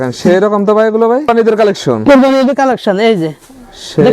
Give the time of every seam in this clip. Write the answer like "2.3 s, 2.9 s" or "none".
1.3 s